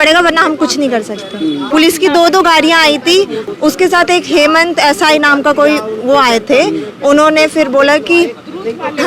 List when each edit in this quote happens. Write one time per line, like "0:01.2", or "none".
0:01.6
0:03.4